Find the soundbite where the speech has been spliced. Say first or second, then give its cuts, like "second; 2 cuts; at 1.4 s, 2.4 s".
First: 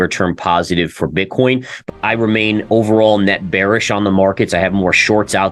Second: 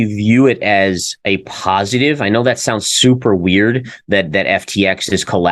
first; 1 cut; at 1.8 s